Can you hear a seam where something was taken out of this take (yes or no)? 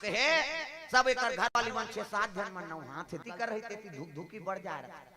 yes